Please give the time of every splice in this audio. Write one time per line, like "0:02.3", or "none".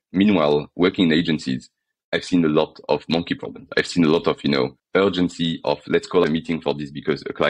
0:04.8
0:06.2